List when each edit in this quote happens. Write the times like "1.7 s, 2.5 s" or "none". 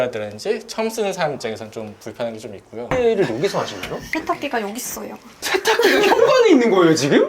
2.9 s